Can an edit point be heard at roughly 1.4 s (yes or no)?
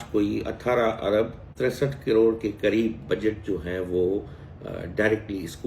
yes